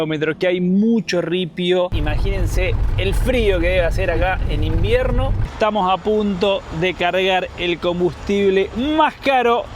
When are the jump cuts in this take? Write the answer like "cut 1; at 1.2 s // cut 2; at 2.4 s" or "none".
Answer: cut 1; at 1.9 s // cut 2; at 5.4 s